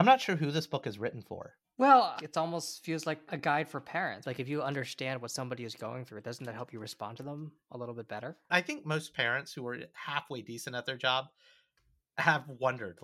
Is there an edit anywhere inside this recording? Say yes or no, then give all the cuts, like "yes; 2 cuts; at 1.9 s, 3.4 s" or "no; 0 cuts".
yes; 4 cuts; at 2.2 s, 3.2 s, 4.2 s, 8.5 s